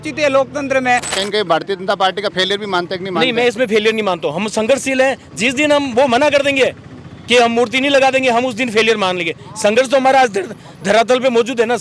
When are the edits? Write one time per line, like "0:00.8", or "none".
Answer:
0:01.1

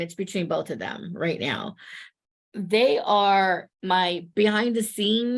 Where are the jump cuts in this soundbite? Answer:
0:03.9

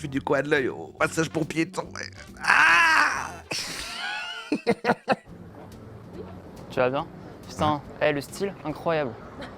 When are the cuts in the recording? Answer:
0:05.3

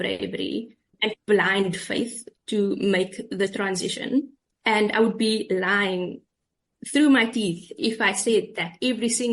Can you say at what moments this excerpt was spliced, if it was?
0:04.4

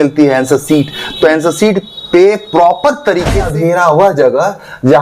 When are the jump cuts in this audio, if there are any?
0:03.4

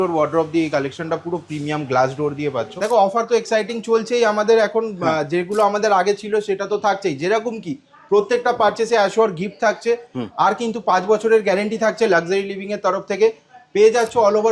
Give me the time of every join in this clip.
0:02.7

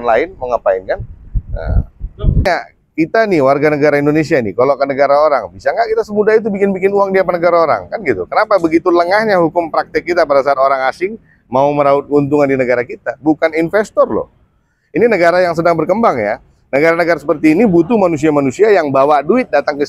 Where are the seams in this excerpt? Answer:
0:02.5

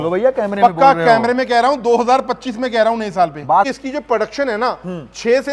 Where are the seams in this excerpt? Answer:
0:03.7

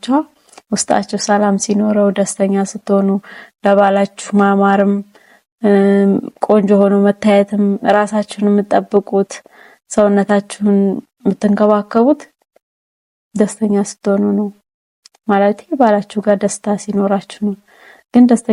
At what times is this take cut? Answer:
none

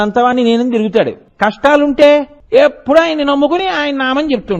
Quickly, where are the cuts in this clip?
0:01.2
0:02.4

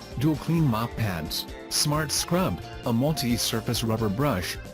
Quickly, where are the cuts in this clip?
0:01.2

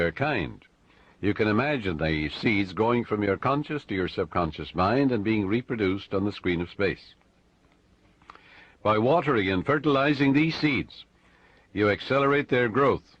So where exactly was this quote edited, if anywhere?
0:04.1

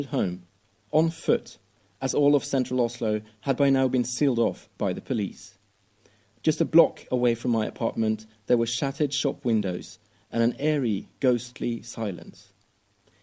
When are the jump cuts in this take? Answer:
0:07.2

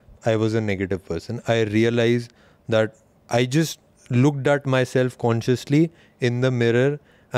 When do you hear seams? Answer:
none

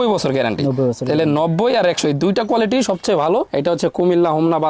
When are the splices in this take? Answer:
0:03.5

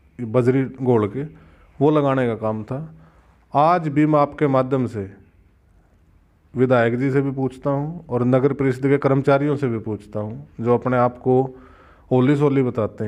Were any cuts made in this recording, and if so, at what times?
none

